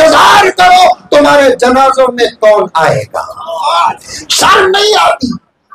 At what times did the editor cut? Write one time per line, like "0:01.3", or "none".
0:03.9